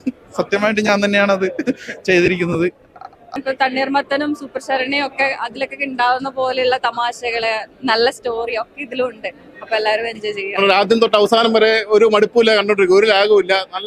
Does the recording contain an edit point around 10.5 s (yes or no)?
yes